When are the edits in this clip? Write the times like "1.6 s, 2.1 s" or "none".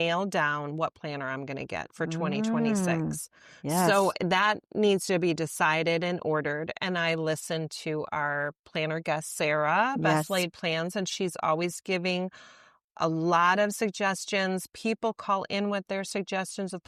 none